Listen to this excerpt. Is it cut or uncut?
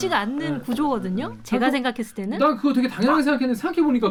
uncut